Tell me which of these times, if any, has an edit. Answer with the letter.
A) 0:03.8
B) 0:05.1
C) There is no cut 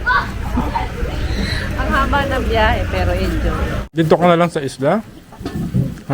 A